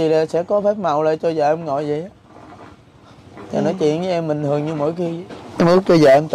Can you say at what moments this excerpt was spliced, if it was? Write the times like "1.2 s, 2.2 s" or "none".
5.4 s